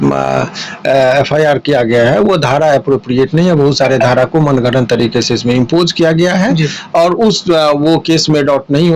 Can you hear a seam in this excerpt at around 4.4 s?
no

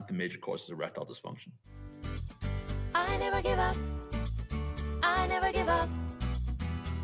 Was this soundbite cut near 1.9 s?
yes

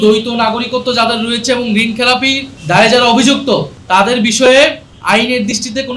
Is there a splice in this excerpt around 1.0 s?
no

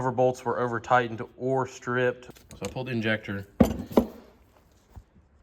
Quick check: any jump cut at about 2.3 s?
yes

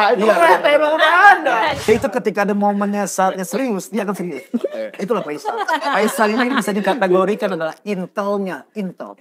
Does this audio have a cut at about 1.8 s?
yes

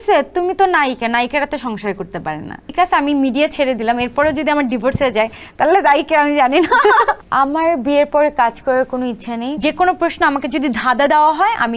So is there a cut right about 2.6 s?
yes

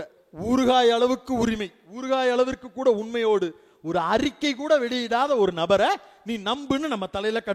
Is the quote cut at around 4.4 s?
no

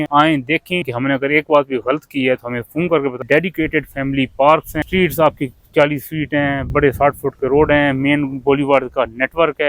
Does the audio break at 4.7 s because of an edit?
yes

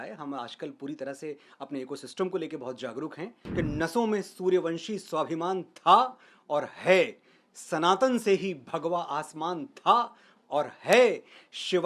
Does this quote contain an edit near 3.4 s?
yes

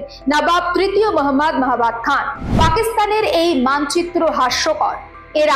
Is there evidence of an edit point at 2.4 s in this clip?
yes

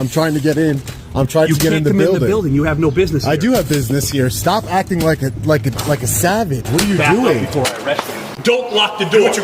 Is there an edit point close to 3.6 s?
no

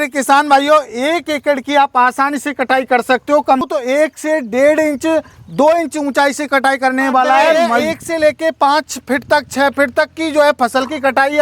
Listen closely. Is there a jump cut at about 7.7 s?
yes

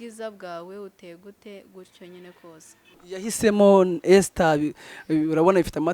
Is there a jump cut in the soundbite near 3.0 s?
yes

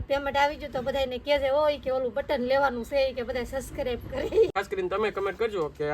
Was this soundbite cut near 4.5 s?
yes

